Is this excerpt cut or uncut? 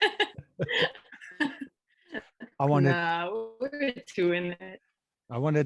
uncut